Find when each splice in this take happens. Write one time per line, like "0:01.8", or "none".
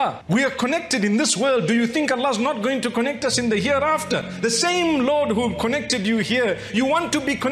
none

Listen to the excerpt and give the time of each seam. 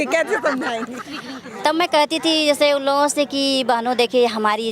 none

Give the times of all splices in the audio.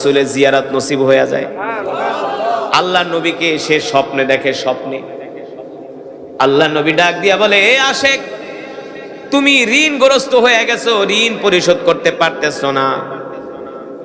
none

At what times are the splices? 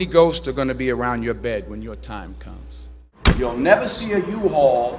none

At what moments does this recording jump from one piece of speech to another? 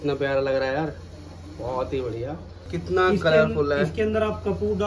0:02.6

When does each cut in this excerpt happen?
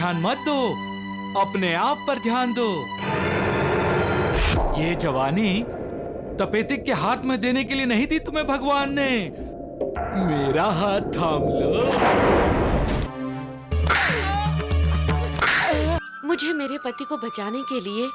0:12.9
0:16.0

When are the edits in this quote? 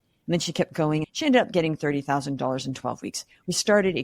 0:01.0

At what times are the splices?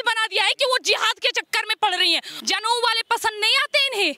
0:02.3

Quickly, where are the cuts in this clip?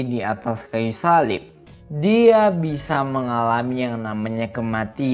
0:01.5

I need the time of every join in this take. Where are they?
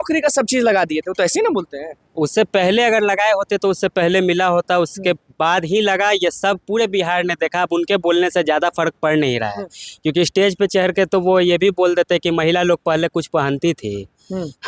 none

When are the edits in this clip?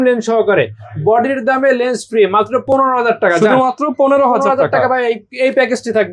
none

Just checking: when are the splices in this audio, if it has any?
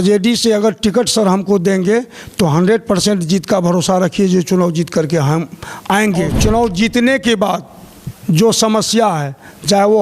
0:06.4

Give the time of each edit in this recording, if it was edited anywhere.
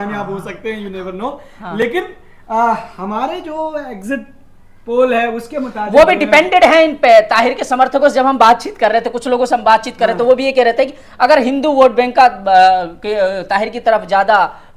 none

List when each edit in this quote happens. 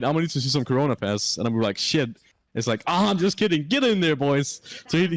none

